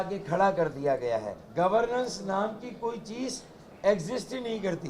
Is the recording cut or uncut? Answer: cut